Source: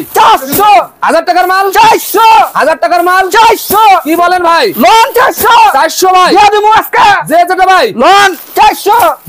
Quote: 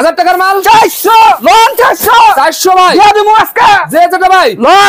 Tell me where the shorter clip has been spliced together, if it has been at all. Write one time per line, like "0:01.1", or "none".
0:01.4